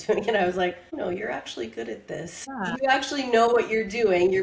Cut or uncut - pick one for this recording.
cut